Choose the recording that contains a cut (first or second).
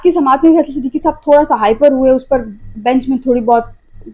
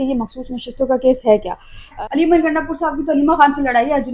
second